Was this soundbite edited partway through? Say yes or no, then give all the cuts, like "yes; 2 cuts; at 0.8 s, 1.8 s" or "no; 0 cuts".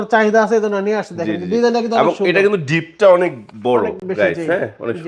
no; 0 cuts